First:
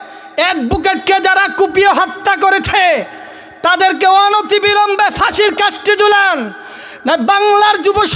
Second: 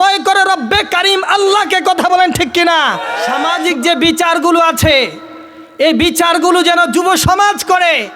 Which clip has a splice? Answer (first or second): second